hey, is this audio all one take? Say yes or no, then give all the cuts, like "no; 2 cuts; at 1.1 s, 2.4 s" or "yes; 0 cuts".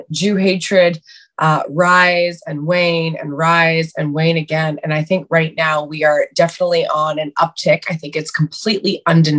yes; 0 cuts